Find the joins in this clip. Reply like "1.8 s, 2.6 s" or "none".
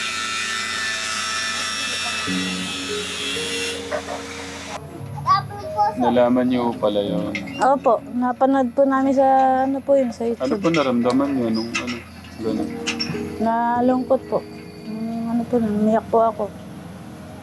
4.7 s